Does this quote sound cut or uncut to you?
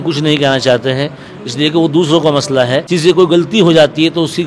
cut